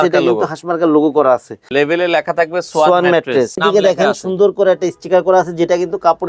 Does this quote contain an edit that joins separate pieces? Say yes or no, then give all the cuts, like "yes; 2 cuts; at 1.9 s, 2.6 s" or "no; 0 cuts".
yes; 2 cuts; at 1.7 s, 3.6 s